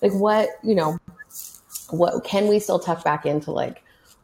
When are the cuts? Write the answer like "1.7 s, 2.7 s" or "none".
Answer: none